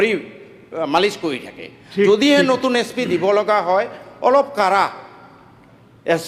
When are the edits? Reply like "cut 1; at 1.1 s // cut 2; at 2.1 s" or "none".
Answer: cut 1; at 1.8 s